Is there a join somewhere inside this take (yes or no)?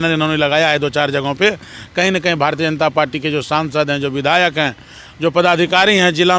no